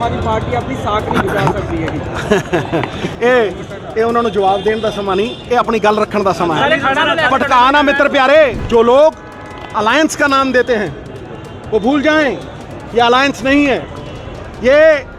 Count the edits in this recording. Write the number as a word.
one